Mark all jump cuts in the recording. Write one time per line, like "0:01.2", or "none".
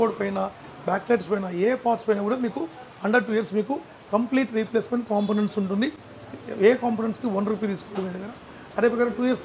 none